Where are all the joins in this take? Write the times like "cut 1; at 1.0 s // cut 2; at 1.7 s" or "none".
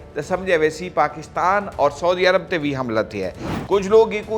cut 1; at 3.4 s